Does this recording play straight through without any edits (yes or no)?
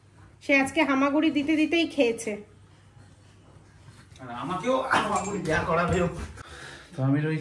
yes